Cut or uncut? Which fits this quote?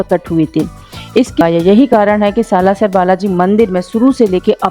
cut